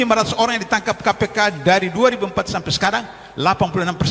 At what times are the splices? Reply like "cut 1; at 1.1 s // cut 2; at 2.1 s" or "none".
none